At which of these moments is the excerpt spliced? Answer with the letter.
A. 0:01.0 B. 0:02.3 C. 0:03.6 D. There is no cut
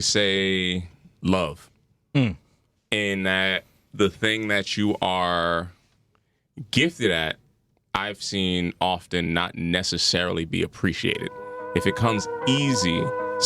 A